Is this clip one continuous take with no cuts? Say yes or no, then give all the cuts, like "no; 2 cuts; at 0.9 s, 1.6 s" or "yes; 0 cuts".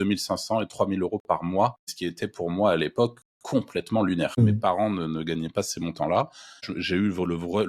no; 3 cuts; at 1.8 s, 4.6 s, 6.7 s